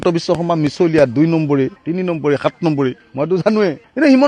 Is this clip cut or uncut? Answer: uncut